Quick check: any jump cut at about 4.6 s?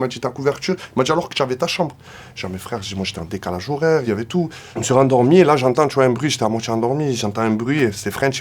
yes; 1 cut; at 4.6 s

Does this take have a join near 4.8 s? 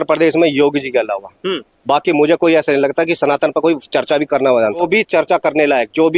yes; 1 cut; at 4.8 s

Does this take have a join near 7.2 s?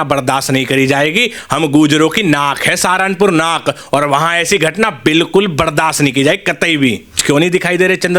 yes; 1 cut; at 7.2 s

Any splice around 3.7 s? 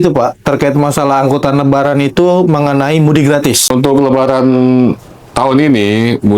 yes; 1 cut; at 3.7 s

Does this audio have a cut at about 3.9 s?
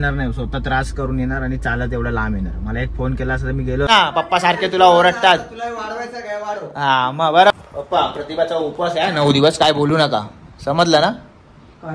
yes; 2 cuts; at 3.9 s, 7.5 s

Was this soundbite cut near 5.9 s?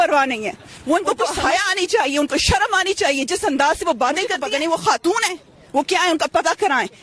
no; 2 cuts; at 1.3 s, 4.4 s

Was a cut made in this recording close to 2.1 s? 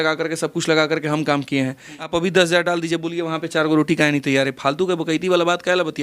yes; 1 cut; at 2.1 s

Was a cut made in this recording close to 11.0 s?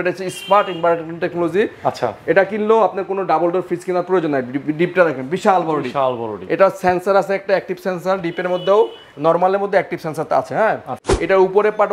yes; 1 cut; at 11.0 s

